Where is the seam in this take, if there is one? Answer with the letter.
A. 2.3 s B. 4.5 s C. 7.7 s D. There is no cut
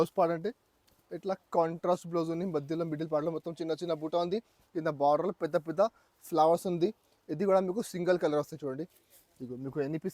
D